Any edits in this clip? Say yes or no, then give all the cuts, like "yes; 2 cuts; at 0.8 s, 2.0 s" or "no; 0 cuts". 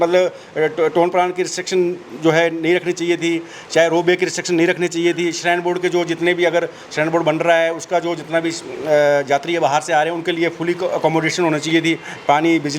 no; 0 cuts